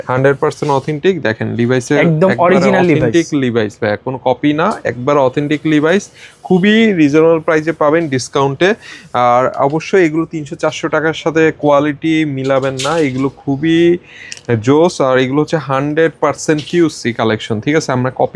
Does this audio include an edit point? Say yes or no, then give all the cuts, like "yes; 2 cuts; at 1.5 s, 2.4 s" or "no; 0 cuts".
no; 0 cuts